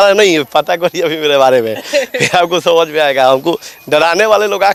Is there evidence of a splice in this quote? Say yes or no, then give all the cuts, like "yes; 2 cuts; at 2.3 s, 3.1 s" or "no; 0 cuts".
no; 0 cuts